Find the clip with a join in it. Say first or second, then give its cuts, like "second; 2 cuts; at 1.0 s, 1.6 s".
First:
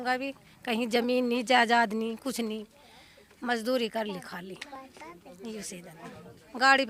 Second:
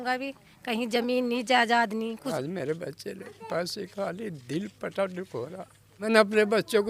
second; 2 cuts; at 2.3 s, 6.0 s